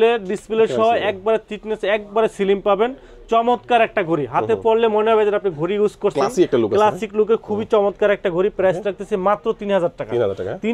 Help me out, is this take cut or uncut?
uncut